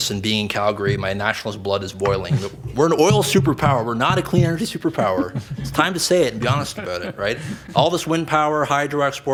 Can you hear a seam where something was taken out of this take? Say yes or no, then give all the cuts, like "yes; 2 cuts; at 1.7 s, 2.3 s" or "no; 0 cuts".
no; 0 cuts